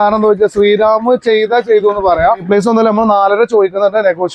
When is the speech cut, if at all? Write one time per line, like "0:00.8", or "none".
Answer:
0:02.4